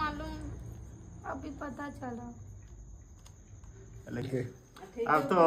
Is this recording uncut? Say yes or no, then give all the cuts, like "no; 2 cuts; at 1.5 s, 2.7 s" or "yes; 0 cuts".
no; 1 cut; at 4.2 s